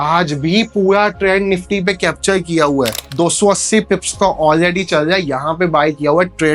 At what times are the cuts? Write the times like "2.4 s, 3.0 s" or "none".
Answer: 3.0 s